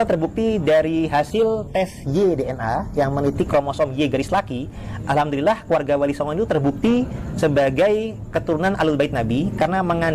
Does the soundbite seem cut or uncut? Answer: uncut